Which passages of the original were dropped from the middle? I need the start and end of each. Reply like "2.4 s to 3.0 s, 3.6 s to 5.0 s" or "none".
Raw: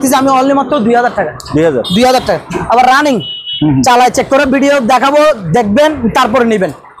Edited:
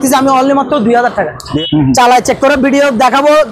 1.5 s to 3.3 s